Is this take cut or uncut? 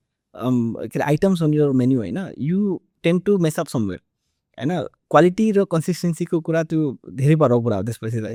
uncut